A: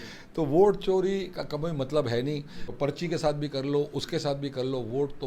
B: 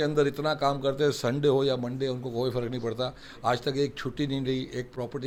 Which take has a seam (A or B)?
A